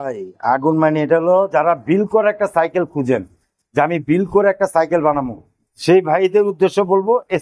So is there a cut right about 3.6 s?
no; 0 cuts

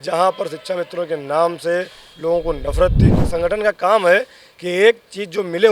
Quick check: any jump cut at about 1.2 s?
no; 1 cut; at 3.1 s

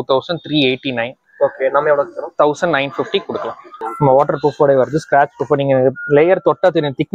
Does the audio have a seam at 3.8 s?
yes; 1 cut; at 3.8 s

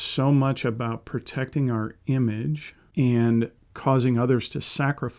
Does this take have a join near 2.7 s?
yes; 1 cut; at 2.7 s

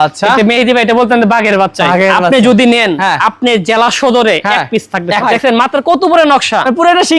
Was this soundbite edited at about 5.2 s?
yes; 1 cut; at 5.2 s

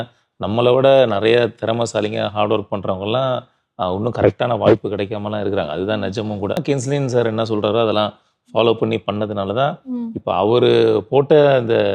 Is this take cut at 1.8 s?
no; 1 cut; at 6.6 s

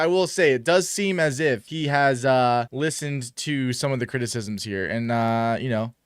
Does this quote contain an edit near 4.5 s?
no; 2 cuts; at 1.7 s, 2.7 s

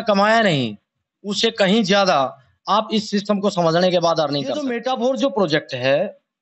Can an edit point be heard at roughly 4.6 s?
yes; 1 cut; at 4.6 s

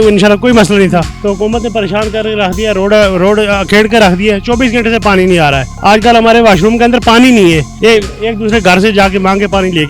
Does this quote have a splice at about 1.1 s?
yes; 3 cuts; at 1.1 s, 5.7 s, 7.7 s

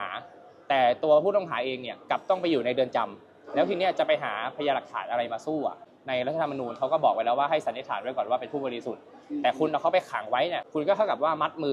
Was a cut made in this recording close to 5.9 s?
yes; 2 cuts; at 5.9 s, 10.6 s

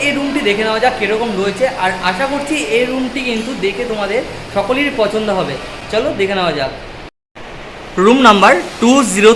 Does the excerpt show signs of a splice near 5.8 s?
no; 0 cuts

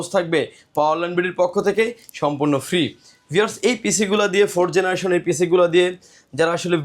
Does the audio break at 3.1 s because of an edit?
no; 0 cuts

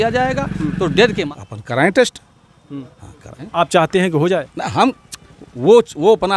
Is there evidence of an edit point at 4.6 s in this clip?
no; 1 cut; at 1.2 s

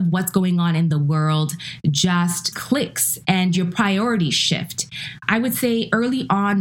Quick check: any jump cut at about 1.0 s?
no; 1 cut; at 2.5 s

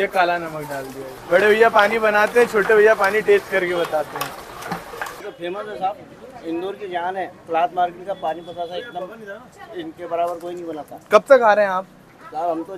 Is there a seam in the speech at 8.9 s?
no; 2 cuts; at 1.1 s, 5.2 s

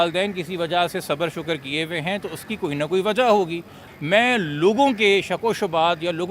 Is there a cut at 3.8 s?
yes; 1 cut; at 3.8 s

